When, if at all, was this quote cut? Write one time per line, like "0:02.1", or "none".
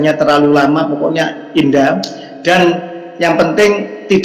none